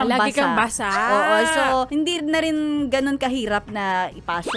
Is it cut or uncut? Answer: cut